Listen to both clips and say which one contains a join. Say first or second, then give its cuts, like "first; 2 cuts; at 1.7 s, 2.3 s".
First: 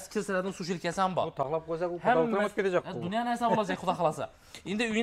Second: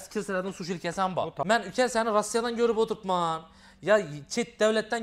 second; 1 cut; at 1.5 s